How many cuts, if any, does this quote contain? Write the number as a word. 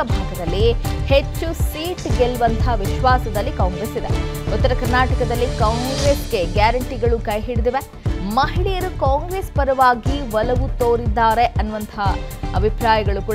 one